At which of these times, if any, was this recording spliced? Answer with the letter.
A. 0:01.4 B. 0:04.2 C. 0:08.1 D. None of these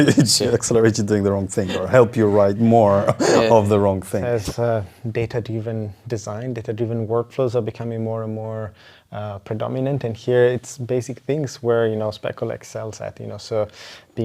B